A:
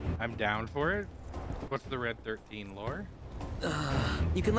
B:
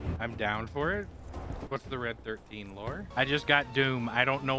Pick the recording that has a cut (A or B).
B